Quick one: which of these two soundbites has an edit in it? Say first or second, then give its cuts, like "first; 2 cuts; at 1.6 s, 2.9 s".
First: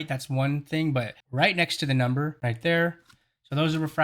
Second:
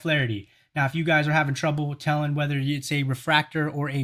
first; 2 cuts; at 1.2 s, 2.4 s